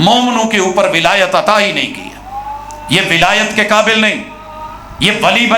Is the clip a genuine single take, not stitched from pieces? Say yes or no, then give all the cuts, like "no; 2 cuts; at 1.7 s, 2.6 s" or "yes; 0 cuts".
yes; 0 cuts